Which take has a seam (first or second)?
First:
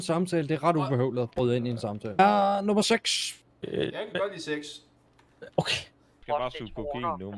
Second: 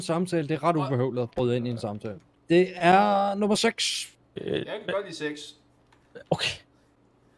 first